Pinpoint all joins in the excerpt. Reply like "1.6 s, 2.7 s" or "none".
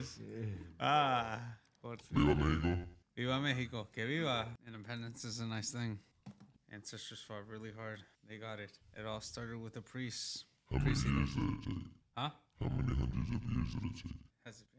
4.7 s